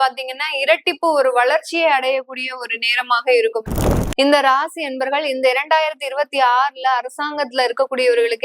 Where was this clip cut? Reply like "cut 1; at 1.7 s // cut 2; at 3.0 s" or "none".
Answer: cut 1; at 3.8 s